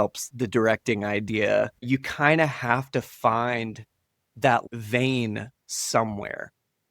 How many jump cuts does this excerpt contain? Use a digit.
1